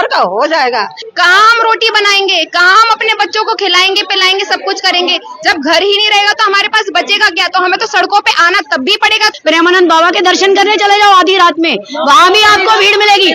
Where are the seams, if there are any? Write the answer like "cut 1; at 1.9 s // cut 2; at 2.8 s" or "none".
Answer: cut 1; at 1.0 s // cut 2; at 9.3 s